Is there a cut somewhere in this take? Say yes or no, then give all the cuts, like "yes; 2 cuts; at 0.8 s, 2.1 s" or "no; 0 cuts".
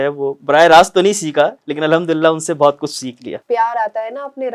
yes; 1 cut; at 3.4 s